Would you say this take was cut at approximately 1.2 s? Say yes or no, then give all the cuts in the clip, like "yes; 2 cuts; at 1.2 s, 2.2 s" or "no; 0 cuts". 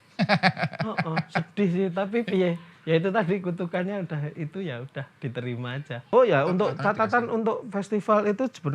no; 1 cut; at 6.0 s